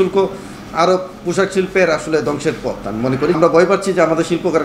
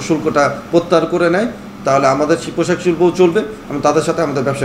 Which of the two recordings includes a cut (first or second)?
first